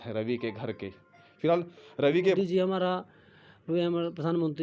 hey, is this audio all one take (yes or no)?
no